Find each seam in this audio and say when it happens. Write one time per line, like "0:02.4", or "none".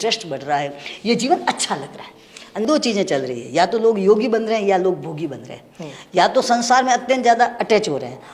0:02.6